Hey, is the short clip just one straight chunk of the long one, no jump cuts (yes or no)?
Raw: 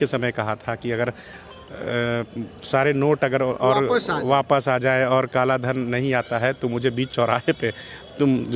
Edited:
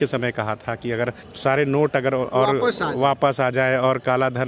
no